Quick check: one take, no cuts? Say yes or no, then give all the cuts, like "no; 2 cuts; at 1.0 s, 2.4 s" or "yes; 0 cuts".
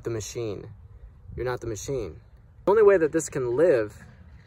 no; 1 cut; at 2.7 s